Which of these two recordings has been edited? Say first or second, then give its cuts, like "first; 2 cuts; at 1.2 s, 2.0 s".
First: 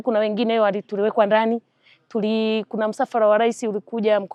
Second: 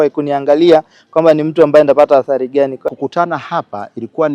second; 1 cut; at 2.9 s